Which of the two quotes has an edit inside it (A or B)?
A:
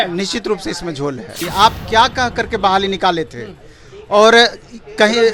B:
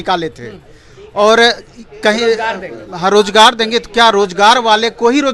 A